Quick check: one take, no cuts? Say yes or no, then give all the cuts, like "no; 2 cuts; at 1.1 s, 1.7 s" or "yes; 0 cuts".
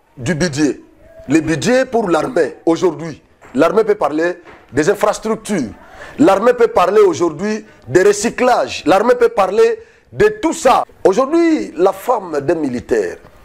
yes; 0 cuts